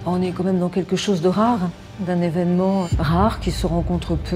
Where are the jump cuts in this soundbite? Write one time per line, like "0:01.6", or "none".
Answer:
0:01.9
0:02.9